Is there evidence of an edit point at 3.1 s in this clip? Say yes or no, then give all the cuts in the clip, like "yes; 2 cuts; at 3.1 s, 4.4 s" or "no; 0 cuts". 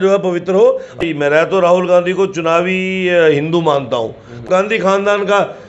no; 2 cuts; at 1.0 s, 4.4 s